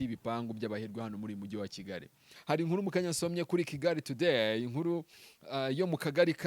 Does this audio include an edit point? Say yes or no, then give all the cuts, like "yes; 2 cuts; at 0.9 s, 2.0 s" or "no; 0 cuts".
yes; 1 cut; at 2.3 s